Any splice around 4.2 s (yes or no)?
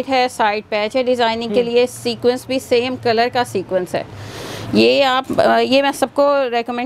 no